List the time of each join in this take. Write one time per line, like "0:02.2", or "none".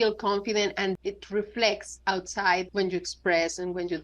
0:00.9
0:02.7